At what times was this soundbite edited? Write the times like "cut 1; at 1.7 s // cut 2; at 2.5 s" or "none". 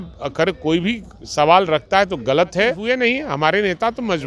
cut 1; at 2.8 s